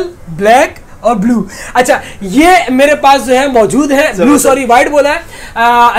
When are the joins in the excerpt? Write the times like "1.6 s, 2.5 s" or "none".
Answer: none